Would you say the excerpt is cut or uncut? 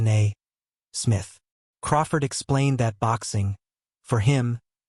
cut